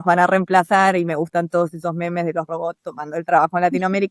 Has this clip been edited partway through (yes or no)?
no